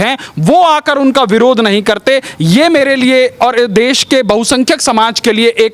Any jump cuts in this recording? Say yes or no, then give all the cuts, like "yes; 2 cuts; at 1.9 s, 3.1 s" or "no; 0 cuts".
no; 0 cuts